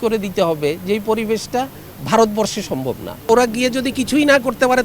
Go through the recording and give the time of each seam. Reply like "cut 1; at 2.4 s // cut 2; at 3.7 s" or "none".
cut 1; at 3.3 s